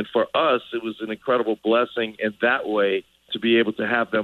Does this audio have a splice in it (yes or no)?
yes